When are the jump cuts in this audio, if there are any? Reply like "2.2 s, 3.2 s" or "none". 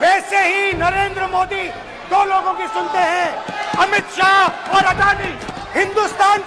5.4 s